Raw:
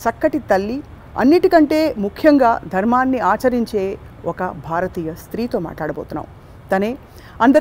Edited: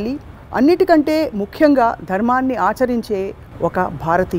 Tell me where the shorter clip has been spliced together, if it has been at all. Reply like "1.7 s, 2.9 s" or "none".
none